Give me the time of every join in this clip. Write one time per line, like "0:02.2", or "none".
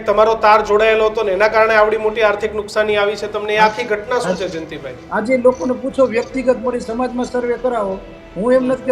0:05.0